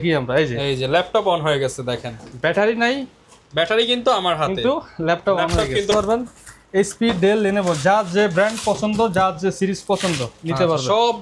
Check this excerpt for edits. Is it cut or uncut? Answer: cut